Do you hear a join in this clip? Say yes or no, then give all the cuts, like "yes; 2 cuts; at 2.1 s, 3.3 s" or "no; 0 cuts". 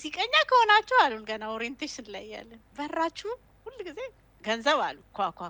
yes; 1 cut; at 2.6 s